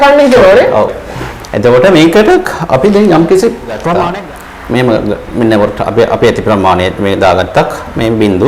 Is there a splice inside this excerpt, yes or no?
yes